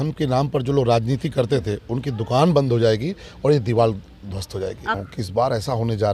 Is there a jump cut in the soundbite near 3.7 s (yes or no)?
no